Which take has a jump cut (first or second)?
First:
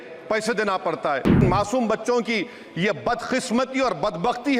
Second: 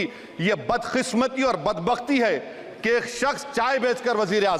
first